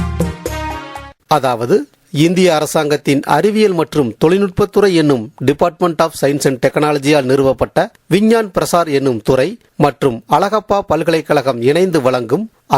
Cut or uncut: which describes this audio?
cut